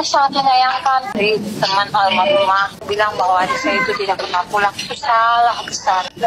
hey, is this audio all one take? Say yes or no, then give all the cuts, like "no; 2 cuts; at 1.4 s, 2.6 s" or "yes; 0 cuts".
no; 2 cuts; at 1.2 s, 2.9 s